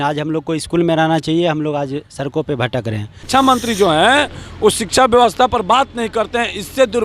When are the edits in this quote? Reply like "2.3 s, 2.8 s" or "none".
3.1 s